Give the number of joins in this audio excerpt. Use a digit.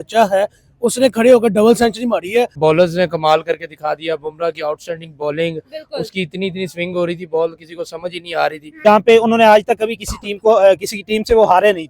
2